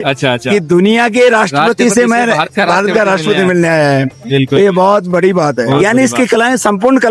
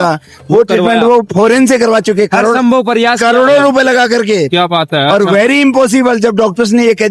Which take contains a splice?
first; 1 cut; at 5.8 s

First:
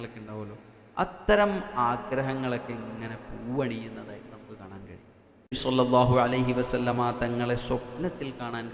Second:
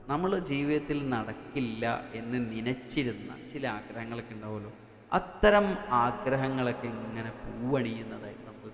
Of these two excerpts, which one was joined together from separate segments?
first; 1 cut; at 5.5 s

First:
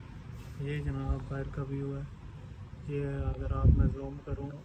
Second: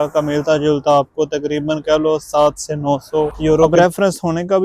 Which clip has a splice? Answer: second; 1 cut; at 3.7 s

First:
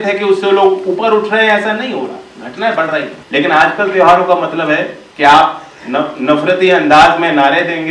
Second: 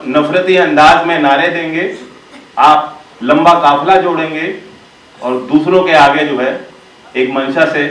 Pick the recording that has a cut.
first; 2 cuts; at 3.2 s, 5.0 s

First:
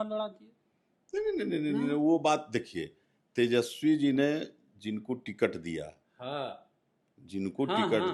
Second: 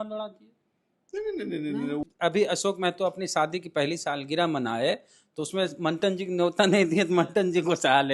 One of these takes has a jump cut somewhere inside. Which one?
second; 1 cut; at 2.0 s

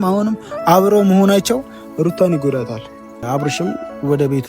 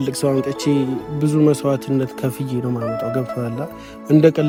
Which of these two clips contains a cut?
first; 1 cut; at 3.1 s

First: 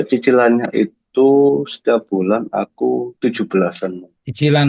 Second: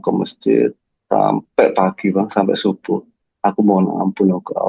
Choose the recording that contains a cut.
first; 1 cut; at 3.1 s

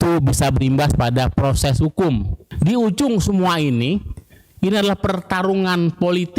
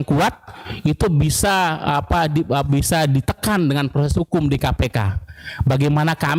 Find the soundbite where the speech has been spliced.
first; 1 cut; at 2.4 s

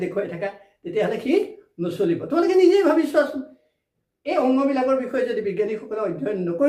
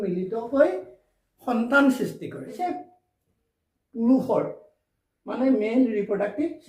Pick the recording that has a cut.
second; 1 cut; at 2.5 s

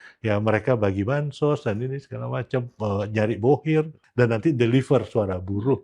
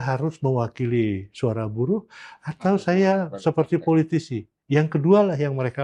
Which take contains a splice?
first; 1 cut; at 4.0 s

